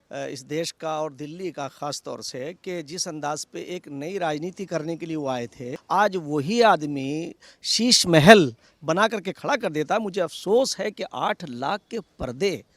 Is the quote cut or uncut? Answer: cut